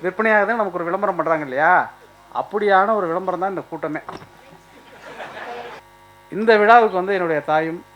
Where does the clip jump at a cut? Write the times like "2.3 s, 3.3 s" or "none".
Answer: 5.7 s